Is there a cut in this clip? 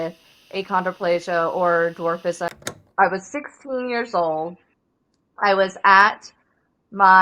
yes; 1 cut; at 2.6 s

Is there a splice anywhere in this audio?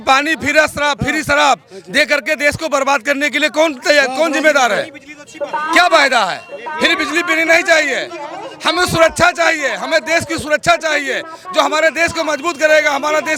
no; 0 cuts

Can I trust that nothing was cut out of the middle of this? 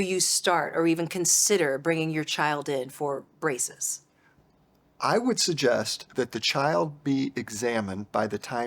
yes; 0 cuts

